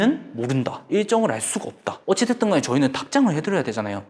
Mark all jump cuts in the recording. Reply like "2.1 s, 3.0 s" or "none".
2.0 s